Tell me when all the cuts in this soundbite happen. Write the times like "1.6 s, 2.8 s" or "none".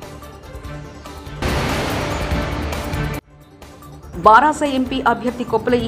1.4 s, 3.3 s